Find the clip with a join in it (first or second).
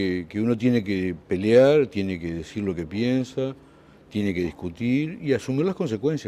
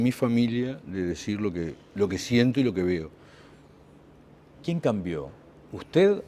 first